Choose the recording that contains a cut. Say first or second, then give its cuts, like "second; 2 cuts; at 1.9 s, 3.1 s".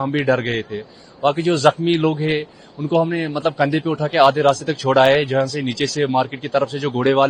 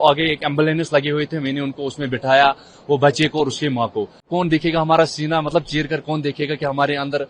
second; 1 cut; at 4.3 s